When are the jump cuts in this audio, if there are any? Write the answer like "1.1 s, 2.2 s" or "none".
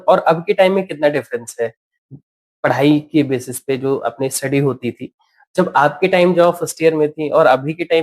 none